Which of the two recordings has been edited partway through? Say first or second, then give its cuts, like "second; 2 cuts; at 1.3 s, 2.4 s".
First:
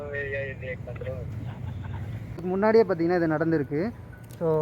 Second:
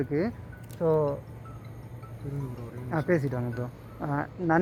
first; 1 cut; at 2.6 s